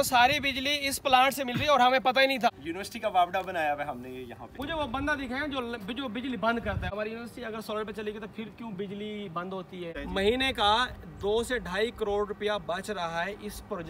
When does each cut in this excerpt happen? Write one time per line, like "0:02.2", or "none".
0:02.5
0:04.5
0:06.9
0:10.0